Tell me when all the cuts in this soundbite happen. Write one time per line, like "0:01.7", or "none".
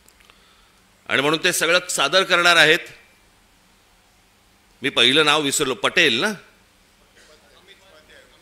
none